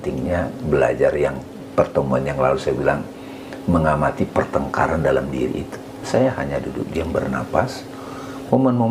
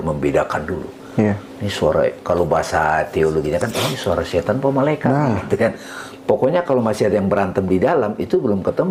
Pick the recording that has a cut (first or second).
first